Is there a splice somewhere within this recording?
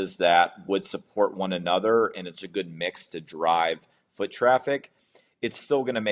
no; 0 cuts

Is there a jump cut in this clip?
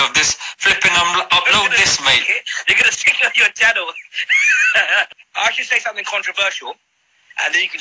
yes; 1 cut; at 5.1 s

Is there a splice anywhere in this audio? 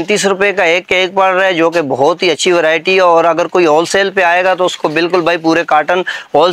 no; 0 cuts

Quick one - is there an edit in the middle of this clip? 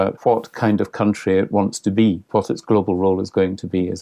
yes; 1 cut; at 2.2 s

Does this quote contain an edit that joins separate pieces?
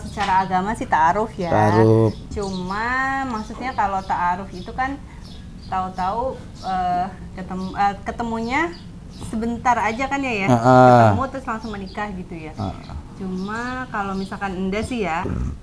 no; 0 cuts

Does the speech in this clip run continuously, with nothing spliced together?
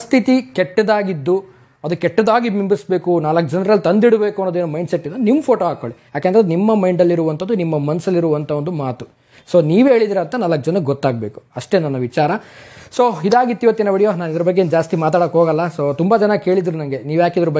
yes; 0 cuts

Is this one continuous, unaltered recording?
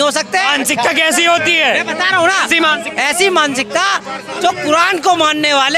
yes; 0 cuts

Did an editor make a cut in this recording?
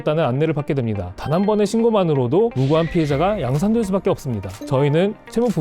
yes; 2 cuts; at 1.2 s, 4.5 s

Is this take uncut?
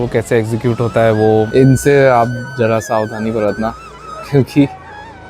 no; 1 cut; at 1.5 s

